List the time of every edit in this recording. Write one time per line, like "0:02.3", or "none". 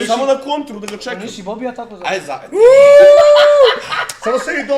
none